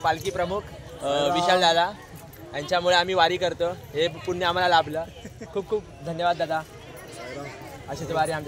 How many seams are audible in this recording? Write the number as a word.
zero